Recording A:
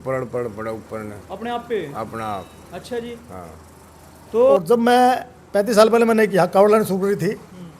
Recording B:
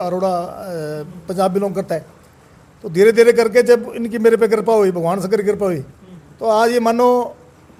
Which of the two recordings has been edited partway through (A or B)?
A